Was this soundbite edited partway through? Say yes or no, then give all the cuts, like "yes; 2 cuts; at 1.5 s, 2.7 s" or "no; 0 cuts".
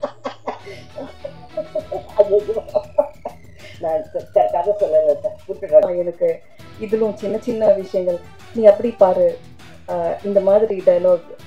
yes; 1 cut; at 5.8 s